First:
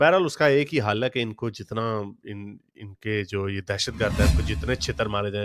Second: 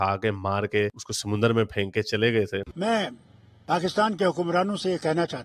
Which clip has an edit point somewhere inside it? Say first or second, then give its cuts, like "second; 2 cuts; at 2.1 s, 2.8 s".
second; 1 cut; at 2.7 s